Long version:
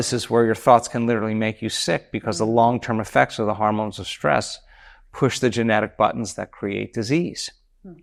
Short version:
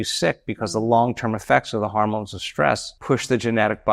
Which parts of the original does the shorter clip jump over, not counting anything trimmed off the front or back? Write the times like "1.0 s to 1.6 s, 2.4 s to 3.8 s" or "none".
4.6 s to 5.0 s